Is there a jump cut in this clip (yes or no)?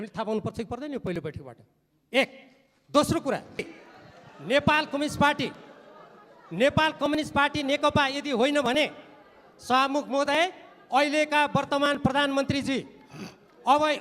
yes